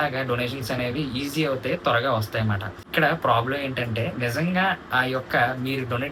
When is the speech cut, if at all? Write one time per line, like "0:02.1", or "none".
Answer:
none